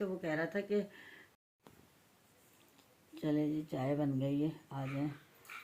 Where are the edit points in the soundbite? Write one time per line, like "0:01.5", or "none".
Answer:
0:01.3